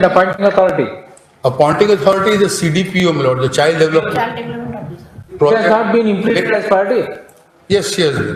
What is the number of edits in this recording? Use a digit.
0